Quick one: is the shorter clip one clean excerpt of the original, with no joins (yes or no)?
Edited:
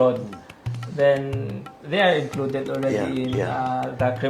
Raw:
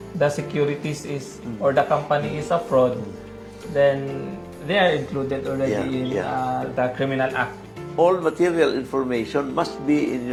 yes